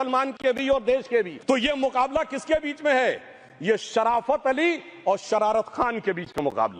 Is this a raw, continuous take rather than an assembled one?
no; 1 cut; at 1.4 s

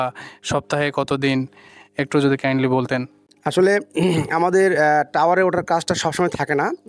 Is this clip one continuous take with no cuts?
yes; 0 cuts

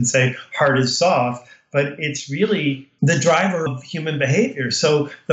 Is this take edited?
yes; 2 cuts; at 2.9 s, 3.7 s

